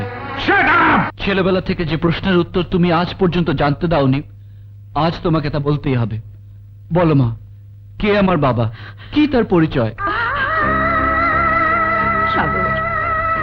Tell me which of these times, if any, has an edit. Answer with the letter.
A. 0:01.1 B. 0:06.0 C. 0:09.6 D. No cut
A